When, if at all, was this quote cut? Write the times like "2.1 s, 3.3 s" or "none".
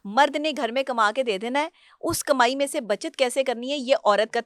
none